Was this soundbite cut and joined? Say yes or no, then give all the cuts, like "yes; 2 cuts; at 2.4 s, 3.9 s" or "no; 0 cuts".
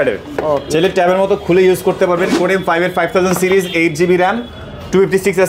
yes; 1 cut; at 2.3 s